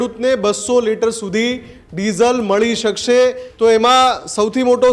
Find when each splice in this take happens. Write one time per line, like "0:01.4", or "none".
0:03.4